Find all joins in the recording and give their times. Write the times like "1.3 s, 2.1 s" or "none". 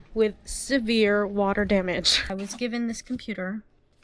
2.2 s

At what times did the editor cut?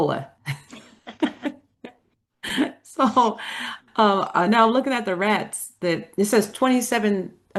none

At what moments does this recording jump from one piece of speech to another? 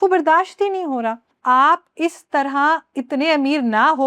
1.3 s

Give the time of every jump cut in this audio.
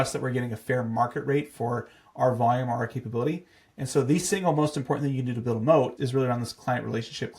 5.9 s

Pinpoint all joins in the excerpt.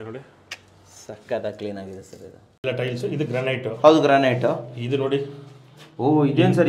2.5 s

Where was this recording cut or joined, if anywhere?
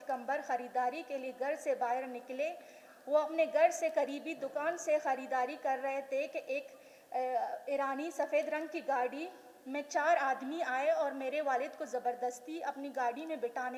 none

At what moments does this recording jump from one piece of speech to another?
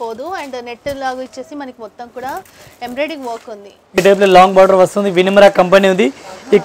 4.0 s

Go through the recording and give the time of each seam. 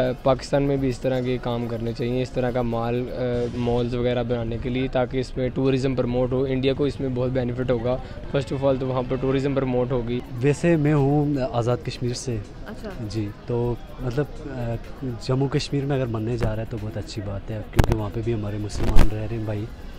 none

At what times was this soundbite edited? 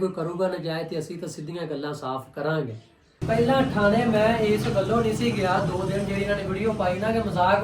3.1 s

